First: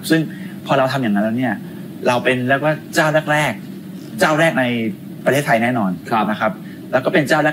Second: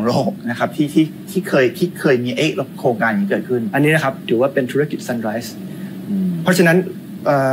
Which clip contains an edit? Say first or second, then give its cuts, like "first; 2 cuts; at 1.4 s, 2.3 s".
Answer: second; 1 cut; at 3.7 s